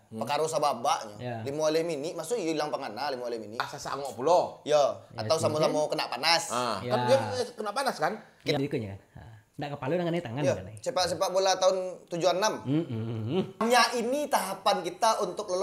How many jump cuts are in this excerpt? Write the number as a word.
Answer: three